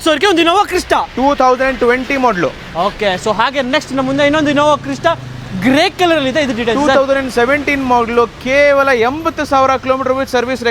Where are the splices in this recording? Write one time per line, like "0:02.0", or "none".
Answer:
none